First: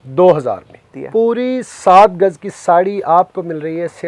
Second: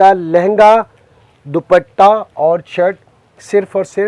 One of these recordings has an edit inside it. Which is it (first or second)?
first